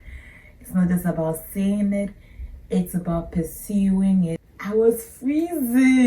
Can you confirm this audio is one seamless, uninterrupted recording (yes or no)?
no